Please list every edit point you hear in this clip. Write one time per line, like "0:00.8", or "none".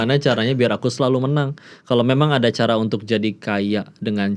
none